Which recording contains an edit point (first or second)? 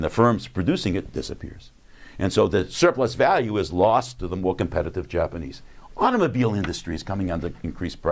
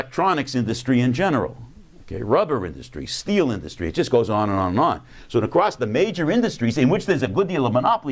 second